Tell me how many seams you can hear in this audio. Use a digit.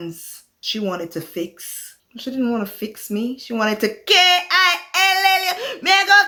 0